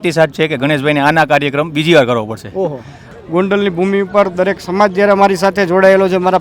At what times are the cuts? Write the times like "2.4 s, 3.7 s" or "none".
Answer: 3.1 s

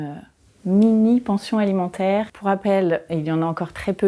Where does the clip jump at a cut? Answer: 2.3 s

